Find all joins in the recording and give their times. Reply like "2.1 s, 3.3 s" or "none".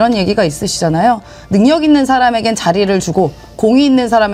none